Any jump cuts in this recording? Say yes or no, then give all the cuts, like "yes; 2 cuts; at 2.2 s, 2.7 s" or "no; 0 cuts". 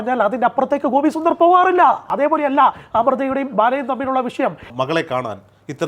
yes; 2 cuts; at 2.1 s, 4.7 s